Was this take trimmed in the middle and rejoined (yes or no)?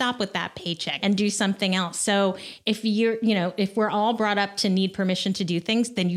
yes